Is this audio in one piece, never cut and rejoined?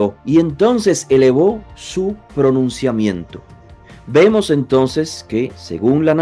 yes; 0 cuts

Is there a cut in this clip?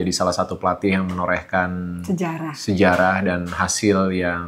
no; 0 cuts

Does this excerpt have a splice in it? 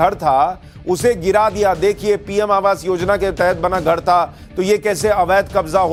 no; 0 cuts

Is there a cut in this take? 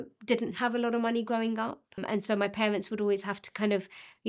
yes; 1 cut; at 2.0 s

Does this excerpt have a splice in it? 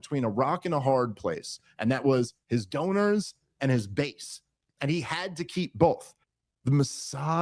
yes; 1 cut; at 6.2 s

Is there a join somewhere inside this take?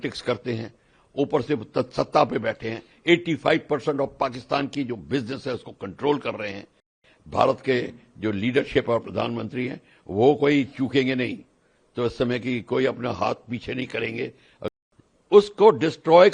yes; 2 cuts; at 7.1 s, 14.7 s

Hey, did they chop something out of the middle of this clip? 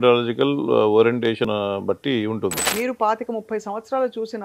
yes; 2 cuts; at 1.5 s, 2.6 s

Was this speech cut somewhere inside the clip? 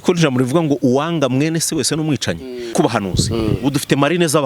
yes; 1 cut; at 2.7 s

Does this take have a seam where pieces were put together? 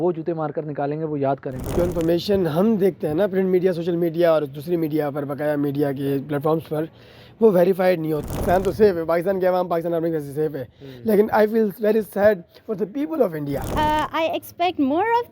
yes; 3 cuts; at 1.7 s, 8.3 s, 13.7 s

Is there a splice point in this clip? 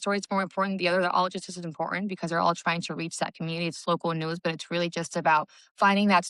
no; 0 cuts

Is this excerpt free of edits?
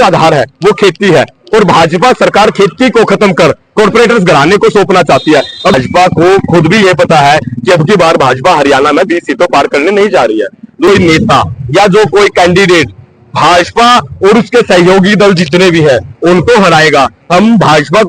no; 2 cuts; at 5.7 s, 10.9 s

